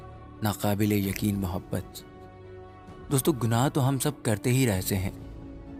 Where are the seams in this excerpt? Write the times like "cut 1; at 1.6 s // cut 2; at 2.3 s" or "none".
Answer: none